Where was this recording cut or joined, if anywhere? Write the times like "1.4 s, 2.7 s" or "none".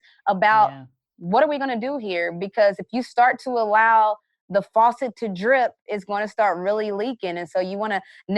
none